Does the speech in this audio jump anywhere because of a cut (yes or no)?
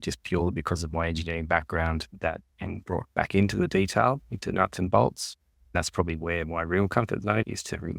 yes